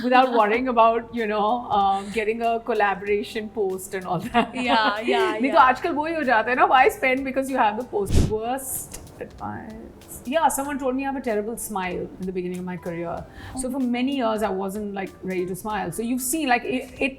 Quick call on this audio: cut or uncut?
cut